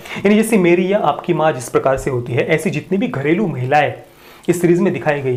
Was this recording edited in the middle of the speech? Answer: no; 0 cuts

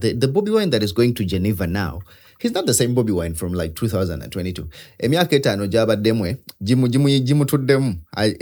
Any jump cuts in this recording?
no; 0 cuts

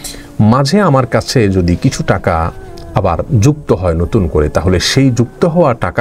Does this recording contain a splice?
no; 0 cuts

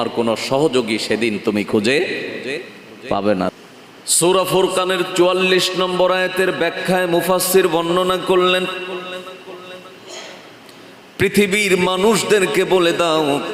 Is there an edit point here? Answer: yes; 1 cut; at 3.6 s

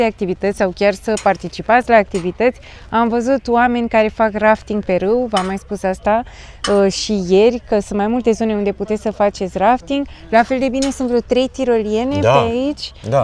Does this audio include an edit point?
no; 0 cuts

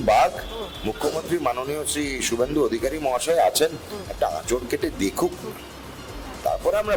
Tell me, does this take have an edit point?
no; 0 cuts

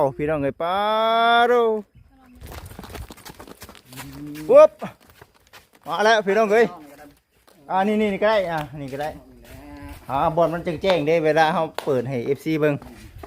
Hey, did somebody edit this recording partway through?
yes; 1 cut; at 2.4 s

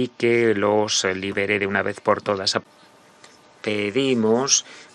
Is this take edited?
yes; 1 cut; at 2.6 s

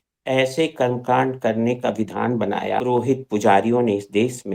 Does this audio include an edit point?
yes; 1 cut; at 2.8 s

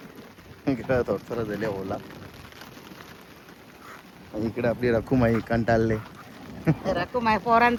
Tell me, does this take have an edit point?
no; 0 cuts

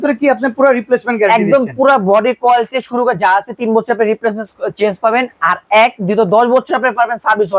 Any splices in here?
no; 0 cuts

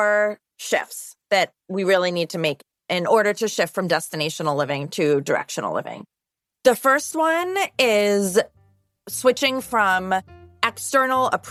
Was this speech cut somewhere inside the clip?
no; 0 cuts

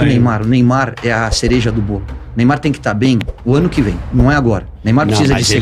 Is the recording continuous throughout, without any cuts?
no; 1 cut; at 4.7 s

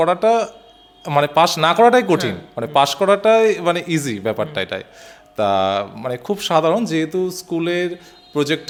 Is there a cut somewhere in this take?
no; 0 cuts

